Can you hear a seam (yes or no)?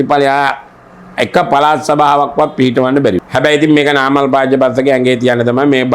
yes